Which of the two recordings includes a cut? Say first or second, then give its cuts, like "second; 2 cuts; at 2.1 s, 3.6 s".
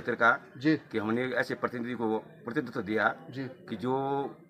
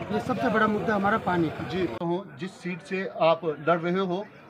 second; 1 cut; at 2.0 s